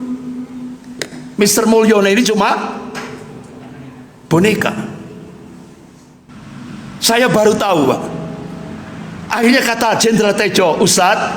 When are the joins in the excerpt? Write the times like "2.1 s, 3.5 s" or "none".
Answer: 6.4 s